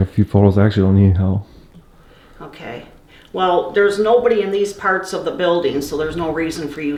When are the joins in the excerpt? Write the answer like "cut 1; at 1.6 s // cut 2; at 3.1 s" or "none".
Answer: none